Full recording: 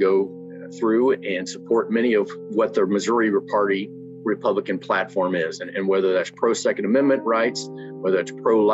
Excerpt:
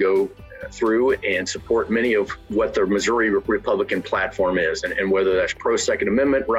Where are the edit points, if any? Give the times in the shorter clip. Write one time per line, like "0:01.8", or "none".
0:03.4